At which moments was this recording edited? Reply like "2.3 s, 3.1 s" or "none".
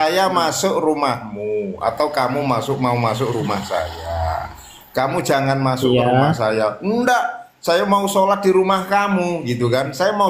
none